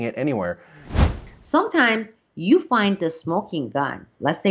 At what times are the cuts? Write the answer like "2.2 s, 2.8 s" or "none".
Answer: 1.0 s

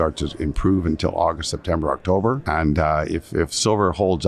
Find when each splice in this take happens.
2.4 s

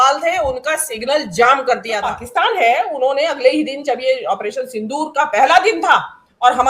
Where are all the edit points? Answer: 2.0 s

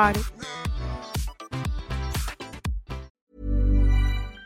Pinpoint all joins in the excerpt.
3.3 s

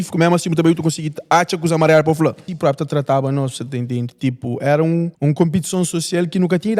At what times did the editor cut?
2.5 s, 5.1 s

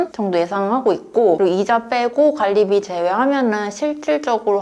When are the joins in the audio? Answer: none

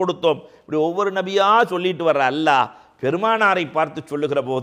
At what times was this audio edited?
none

